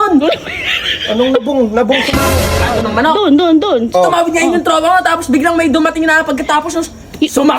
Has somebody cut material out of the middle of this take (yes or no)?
yes